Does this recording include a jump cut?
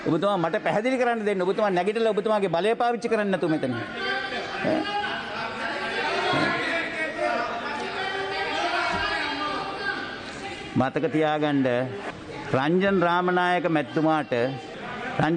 no; 0 cuts

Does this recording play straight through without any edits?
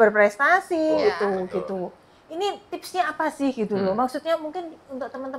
no; 1 cut; at 1.0 s

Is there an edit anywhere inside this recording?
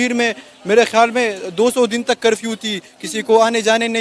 no; 0 cuts

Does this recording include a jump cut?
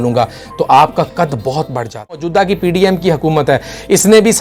yes; 1 cut; at 2.2 s

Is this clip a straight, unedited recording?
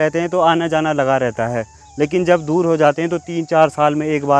yes; 0 cuts

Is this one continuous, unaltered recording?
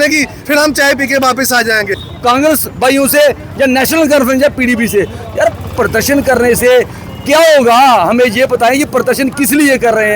no; 1 cut; at 2.0 s

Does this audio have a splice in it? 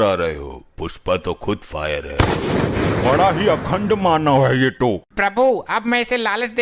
no; 0 cuts

